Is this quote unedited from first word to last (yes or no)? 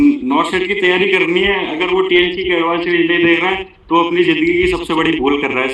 yes